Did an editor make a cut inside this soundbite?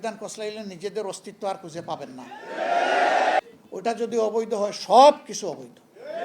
yes; 1 cut; at 3.4 s

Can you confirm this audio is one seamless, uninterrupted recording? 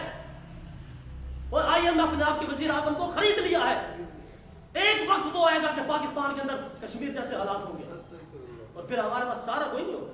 yes; 0 cuts

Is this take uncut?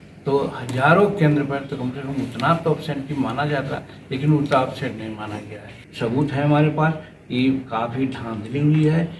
no; 1 cut; at 5.8 s

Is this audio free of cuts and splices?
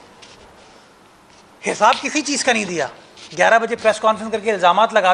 yes; 0 cuts

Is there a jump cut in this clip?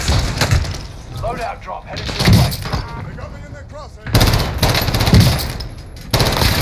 no; 0 cuts

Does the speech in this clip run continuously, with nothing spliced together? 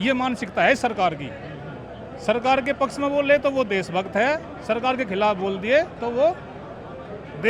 yes; 0 cuts

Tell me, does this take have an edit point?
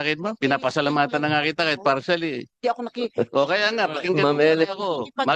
no; 0 cuts

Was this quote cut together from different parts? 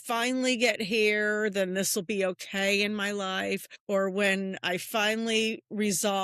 yes; 1 cut; at 3.7 s

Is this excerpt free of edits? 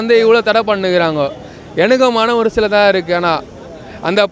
yes; 0 cuts

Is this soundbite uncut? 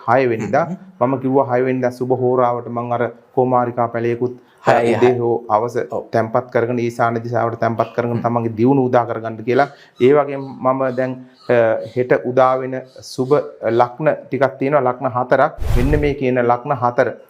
no; 1 cut; at 15.7 s

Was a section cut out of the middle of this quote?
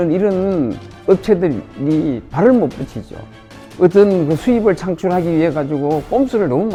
no; 0 cuts

